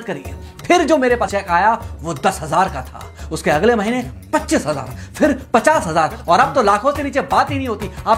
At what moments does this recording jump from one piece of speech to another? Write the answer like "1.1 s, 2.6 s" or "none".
1.2 s